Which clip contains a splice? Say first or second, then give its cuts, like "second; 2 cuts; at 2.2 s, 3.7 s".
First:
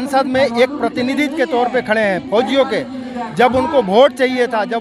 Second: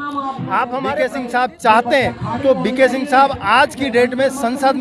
second; 1 cut; at 1.0 s